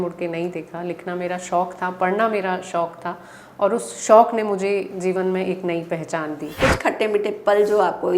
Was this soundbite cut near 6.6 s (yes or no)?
yes